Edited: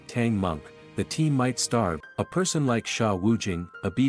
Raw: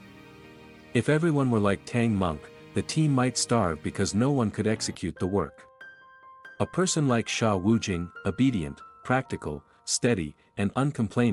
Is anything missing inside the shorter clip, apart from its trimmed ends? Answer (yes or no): yes